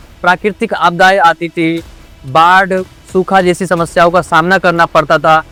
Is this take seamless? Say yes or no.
yes